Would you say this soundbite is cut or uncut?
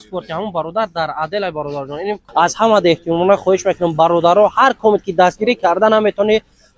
cut